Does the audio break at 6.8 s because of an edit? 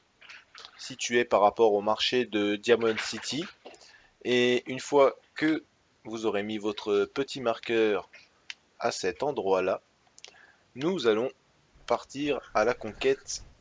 yes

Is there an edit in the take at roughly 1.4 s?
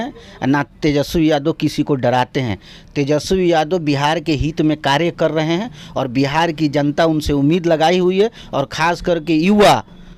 no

